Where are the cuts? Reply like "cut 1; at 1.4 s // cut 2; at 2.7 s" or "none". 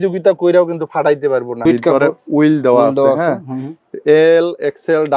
cut 1; at 1.6 s